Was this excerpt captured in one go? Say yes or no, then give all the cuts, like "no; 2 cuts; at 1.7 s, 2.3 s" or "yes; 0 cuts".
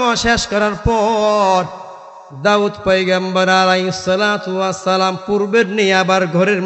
yes; 0 cuts